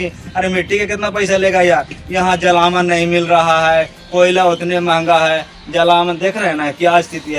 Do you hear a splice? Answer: no; 0 cuts

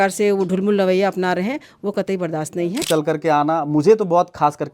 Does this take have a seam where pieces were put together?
yes; 1 cut; at 2.8 s

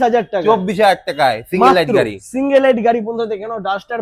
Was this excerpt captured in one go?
yes; 0 cuts

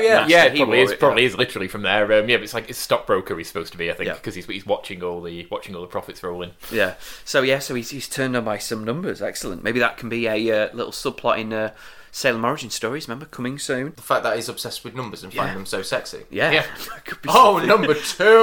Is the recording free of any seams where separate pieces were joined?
no; 1 cut; at 14.0 s

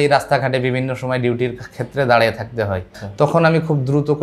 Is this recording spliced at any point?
yes; 1 cut; at 3.0 s

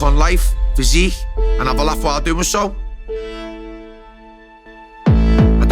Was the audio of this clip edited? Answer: no; 0 cuts

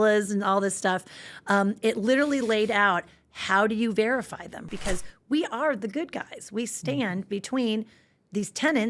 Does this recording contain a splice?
yes; 1 cut; at 4.6 s

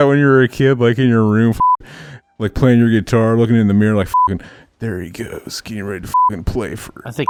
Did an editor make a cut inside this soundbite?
no; 0 cuts

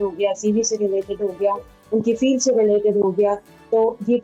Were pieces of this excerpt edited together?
no; 0 cuts

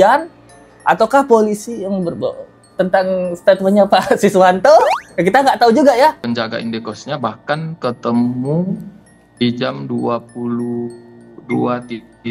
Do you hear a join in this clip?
no; 0 cuts

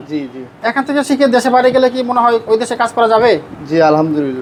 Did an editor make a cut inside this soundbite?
no; 0 cuts

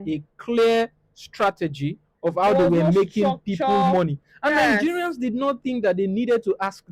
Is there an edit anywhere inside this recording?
no; 0 cuts

